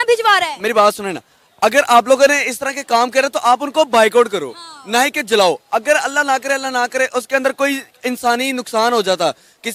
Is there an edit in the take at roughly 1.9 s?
no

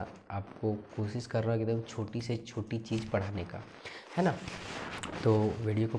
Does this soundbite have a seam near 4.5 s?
no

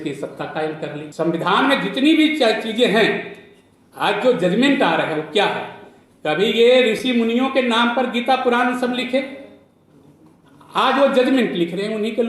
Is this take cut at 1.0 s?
yes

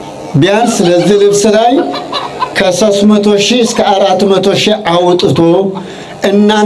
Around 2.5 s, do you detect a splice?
no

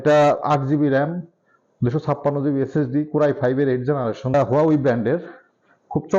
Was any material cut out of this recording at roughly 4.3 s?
yes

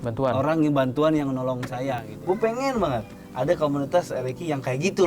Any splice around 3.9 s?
no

